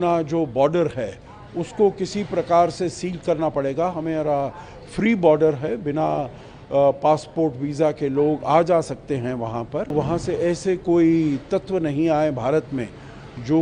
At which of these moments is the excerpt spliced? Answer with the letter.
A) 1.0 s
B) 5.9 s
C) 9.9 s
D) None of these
C